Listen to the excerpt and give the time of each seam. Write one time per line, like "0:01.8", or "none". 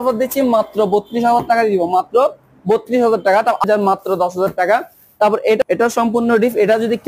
0:03.6
0:05.6